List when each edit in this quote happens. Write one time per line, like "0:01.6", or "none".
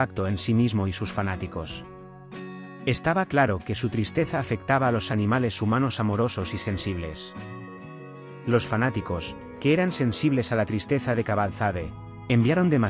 0:07.2
0:08.5